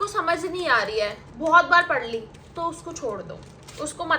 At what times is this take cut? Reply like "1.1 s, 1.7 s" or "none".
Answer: none